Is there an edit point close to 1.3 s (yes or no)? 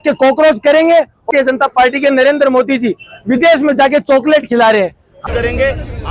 yes